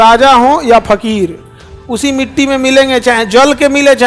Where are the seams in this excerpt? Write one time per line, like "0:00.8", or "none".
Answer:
none